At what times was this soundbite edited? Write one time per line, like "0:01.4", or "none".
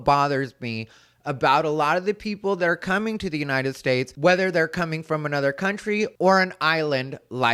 none